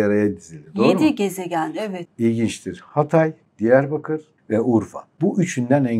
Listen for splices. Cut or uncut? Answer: cut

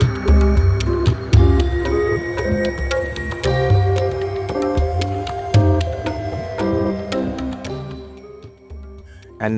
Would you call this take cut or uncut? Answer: uncut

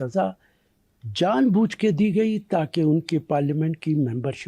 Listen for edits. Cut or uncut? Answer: uncut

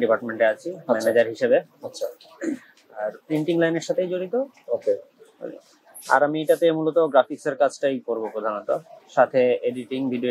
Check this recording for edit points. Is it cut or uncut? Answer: uncut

